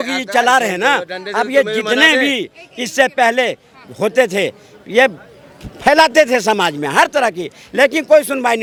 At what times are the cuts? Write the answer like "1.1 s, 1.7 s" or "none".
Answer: none